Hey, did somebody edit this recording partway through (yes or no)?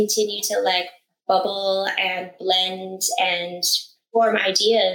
yes